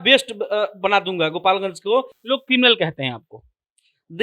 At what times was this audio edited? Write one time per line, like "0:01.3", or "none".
0:02.1

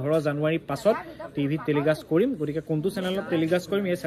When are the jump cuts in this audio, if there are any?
none

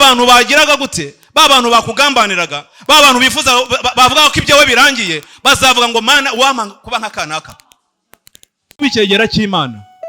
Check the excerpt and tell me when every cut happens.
0:08.8

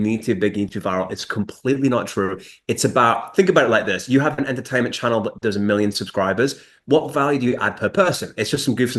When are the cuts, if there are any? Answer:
none

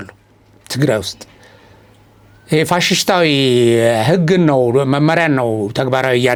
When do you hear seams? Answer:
none

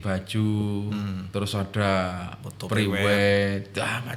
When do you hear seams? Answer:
0:01.2

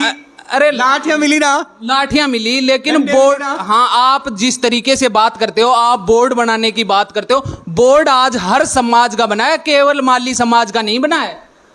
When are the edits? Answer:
none

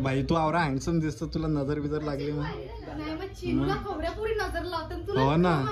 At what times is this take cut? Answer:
none

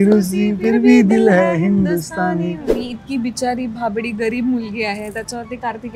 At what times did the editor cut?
0:02.7

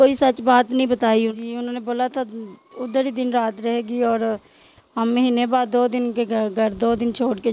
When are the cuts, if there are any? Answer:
0:01.1

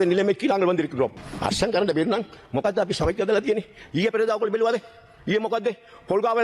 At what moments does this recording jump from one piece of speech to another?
0:01.2

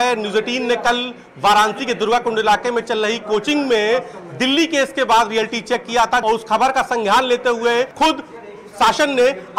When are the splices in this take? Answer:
0:06.2
0:07.9

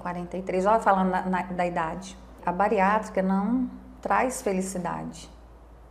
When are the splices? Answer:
0:02.4

